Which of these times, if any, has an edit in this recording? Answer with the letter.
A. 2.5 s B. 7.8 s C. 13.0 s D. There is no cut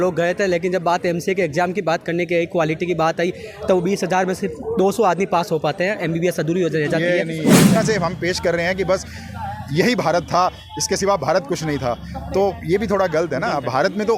B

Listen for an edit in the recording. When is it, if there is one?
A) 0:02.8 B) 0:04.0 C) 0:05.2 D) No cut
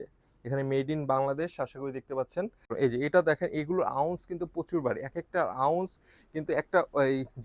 A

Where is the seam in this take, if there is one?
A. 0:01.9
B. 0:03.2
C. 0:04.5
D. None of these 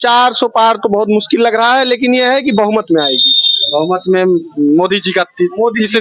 D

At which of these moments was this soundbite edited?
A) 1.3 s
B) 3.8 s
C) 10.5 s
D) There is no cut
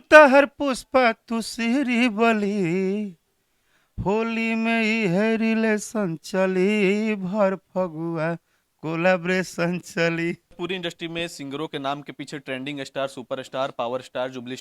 C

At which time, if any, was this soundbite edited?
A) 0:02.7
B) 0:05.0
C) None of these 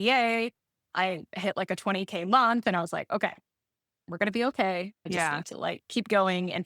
B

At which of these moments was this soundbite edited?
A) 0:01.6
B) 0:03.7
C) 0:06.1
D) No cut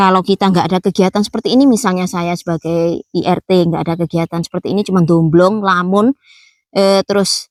D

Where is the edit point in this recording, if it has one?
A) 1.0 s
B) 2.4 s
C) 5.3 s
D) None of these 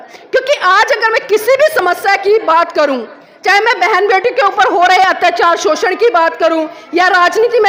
D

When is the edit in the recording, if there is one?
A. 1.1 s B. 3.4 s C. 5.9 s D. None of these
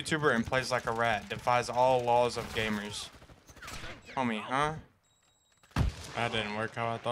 C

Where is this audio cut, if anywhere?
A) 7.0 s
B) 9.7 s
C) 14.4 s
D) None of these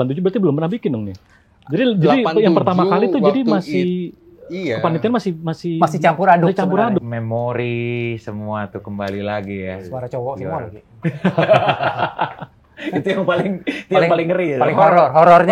A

